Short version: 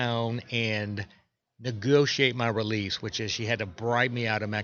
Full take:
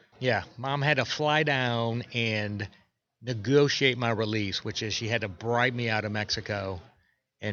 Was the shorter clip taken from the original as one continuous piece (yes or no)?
yes